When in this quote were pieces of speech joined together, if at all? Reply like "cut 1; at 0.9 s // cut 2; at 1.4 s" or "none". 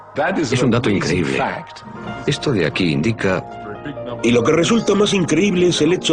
cut 1; at 4.4 s